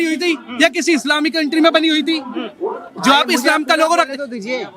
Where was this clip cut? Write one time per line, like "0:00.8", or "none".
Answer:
none